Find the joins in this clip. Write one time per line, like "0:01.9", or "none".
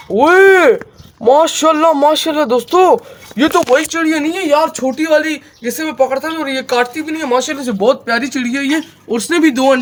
none